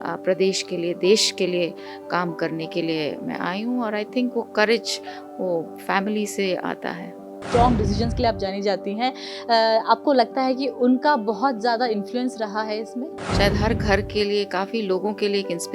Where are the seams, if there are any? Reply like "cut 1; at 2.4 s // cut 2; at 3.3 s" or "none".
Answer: cut 1; at 7.4 s // cut 2; at 13.3 s